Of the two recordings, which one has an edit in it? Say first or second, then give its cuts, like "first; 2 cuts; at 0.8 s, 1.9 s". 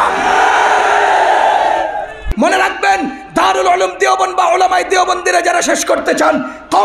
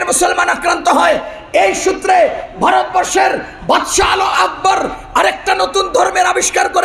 first; 1 cut; at 2.2 s